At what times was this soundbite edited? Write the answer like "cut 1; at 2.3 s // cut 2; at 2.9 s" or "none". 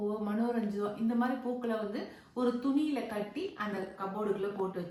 none